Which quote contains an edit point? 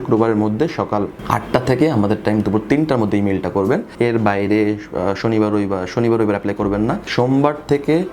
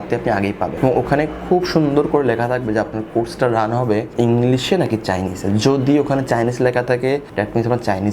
first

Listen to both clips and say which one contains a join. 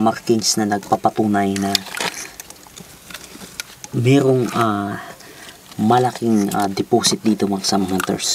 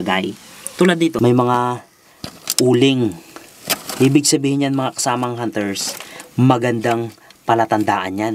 second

